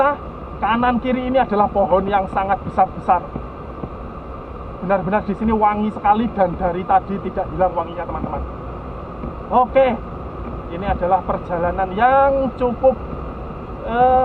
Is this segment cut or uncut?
uncut